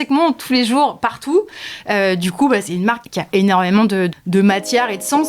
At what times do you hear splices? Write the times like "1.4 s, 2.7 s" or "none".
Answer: 3.1 s, 4.1 s

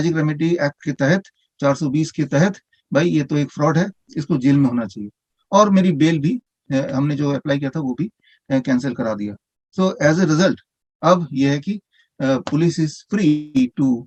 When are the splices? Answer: none

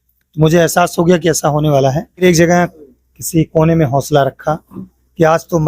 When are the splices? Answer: 2.2 s

